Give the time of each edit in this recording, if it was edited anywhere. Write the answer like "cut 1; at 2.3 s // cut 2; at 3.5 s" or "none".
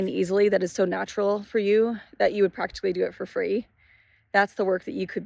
none